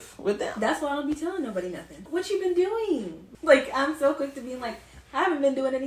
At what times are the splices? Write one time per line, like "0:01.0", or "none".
0:02.1
0:03.3